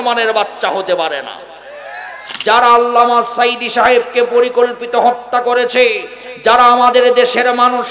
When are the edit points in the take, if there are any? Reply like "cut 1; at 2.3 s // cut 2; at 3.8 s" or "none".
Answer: cut 1; at 2.2 s